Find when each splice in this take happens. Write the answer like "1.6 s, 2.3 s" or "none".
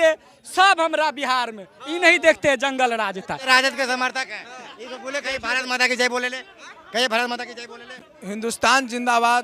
3.5 s